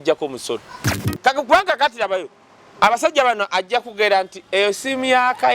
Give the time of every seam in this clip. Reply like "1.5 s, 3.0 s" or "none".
1.1 s